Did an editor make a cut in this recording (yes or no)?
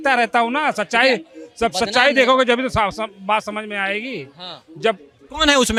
no